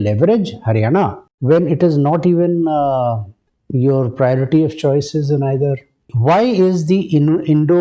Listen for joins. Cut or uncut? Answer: cut